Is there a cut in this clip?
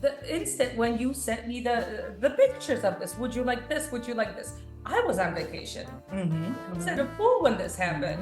no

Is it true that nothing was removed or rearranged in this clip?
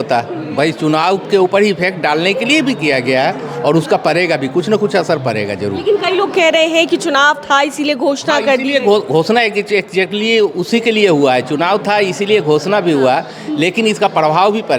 yes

